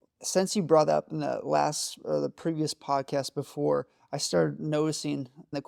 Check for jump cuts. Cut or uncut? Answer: uncut